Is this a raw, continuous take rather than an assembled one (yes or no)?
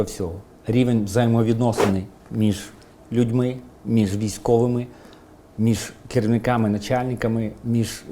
yes